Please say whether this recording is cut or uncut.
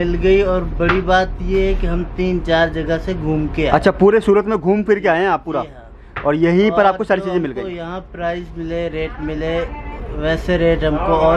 uncut